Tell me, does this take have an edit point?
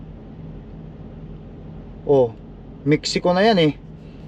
no; 0 cuts

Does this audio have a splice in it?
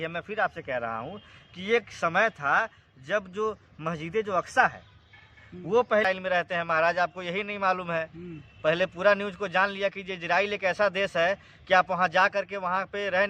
yes; 1 cut; at 6.0 s

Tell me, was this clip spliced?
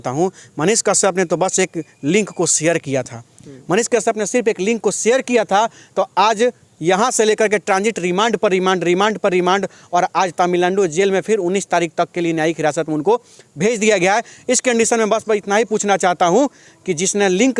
no; 0 cuts

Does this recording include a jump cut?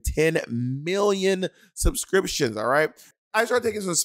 yes; 1 cut; at 3.1 s

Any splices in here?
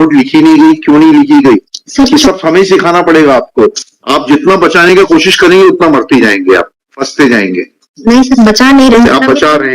yes; 1 cut; at 3.8 s

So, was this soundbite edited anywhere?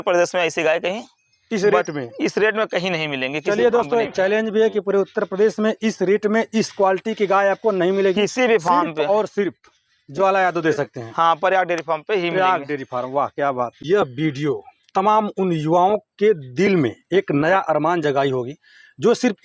yes; 1 cut; at 13.8 s

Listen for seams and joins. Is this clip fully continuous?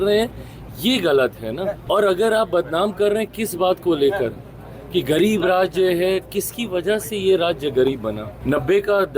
no; 2 cuts; at 1.8 s, 8.3 s

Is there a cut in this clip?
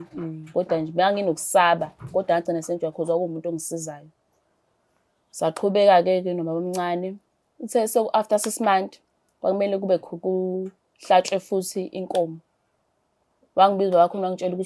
no; 0 cuts

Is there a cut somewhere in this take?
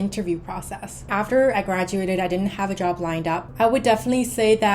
yes; 2 cuts; at 1.1 s, 3.5 s

